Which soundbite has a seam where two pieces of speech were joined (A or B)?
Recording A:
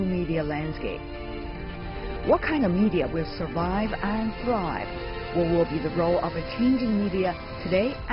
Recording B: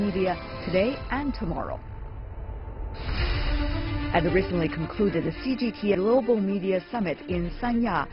B